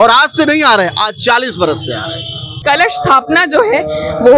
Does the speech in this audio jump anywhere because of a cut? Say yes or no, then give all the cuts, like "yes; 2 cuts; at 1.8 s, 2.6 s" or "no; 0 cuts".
yes; 1 cut; at 2.6 s